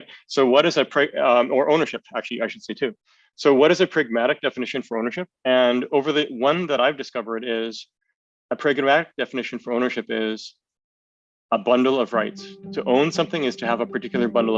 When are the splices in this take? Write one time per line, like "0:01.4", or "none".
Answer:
0:08.3